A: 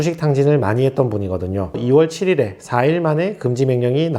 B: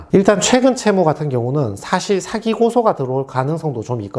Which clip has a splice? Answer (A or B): A